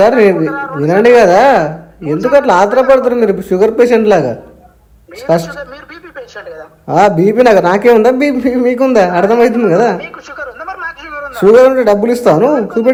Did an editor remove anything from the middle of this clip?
no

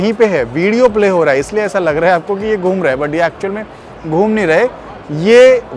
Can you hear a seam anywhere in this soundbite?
no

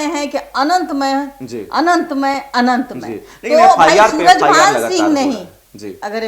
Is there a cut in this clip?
no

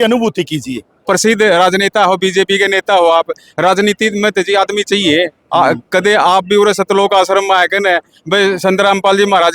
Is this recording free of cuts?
no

